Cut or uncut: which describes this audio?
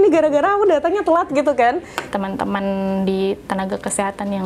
cut